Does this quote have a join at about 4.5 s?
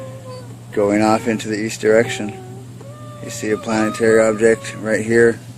no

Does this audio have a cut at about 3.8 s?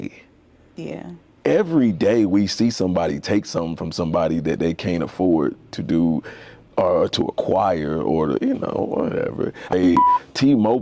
no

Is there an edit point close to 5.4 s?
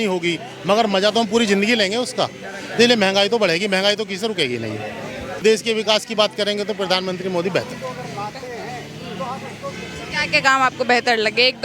yes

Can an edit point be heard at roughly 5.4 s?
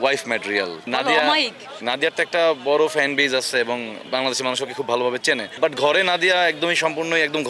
no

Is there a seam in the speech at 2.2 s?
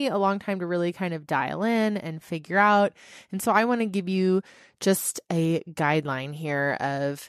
no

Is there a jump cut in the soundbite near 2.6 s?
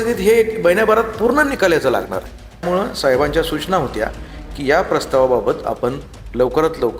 yes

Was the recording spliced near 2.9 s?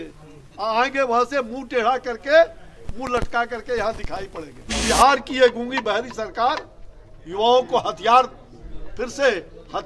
no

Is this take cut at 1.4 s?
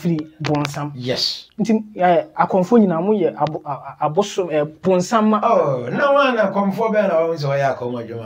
yes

